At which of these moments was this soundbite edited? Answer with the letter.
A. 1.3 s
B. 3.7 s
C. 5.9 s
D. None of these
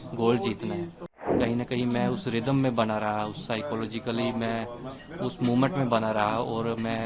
A